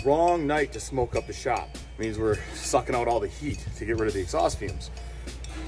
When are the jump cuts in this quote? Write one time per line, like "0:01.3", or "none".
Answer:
0:01.8